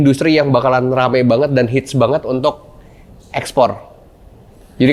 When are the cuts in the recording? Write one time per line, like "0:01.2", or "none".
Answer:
none